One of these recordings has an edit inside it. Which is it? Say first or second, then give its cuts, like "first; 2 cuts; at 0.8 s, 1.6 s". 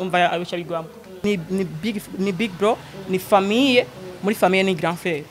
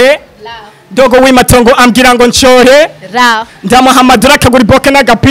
first; 1 cut; at 1.2 s